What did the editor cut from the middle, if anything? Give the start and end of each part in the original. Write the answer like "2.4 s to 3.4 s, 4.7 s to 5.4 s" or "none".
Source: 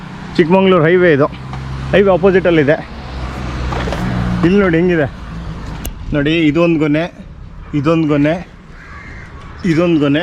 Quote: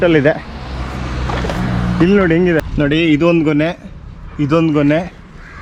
5.1 s to 6.0 s